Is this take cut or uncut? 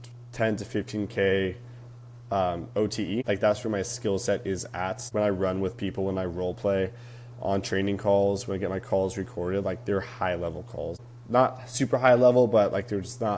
cut